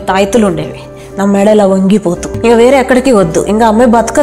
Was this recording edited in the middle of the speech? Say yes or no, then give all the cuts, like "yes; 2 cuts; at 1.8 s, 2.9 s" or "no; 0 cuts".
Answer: yes; 1 cut; at 2.3 s